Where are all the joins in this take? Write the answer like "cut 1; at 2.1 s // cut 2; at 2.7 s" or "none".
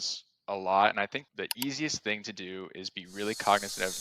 cut 1; at 1.2 s

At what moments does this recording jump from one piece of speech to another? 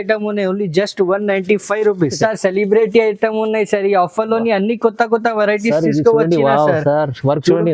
cut 1; at 2.2 s

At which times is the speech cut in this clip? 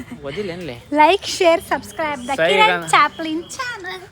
none

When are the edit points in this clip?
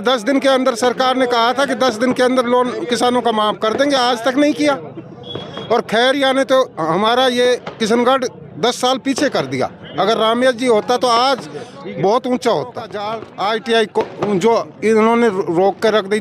cut 1; at 13.2 s

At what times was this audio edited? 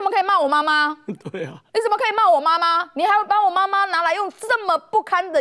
none

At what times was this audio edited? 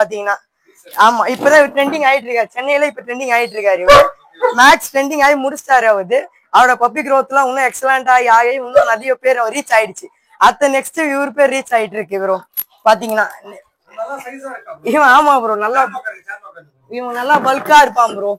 none

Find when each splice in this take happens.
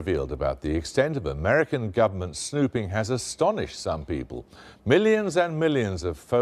cut 1; at 4.0 s

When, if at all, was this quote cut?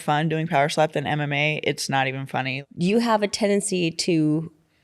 cut 1; at 2.5 s

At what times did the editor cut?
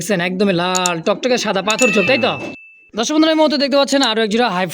cut 1; at 2.5 s

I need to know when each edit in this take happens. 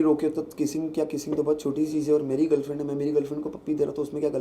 none

